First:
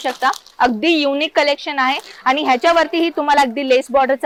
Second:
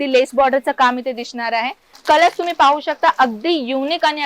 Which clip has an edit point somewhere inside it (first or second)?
second